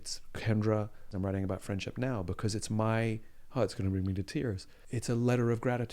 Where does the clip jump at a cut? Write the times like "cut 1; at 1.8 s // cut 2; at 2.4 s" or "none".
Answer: cut 1; at 1.1 s // cut 2; at 4.7 s